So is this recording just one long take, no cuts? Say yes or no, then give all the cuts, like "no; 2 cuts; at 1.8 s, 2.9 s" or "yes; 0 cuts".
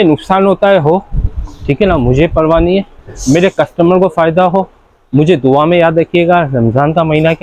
yes; 0 cuts